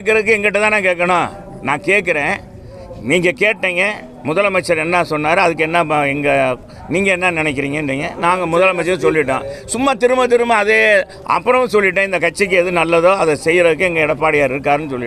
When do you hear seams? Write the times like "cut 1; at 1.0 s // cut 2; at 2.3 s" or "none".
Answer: none